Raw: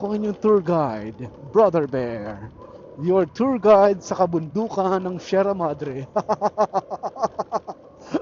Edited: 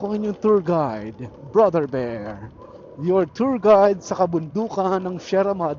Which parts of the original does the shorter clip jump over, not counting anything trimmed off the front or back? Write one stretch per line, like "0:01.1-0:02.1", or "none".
none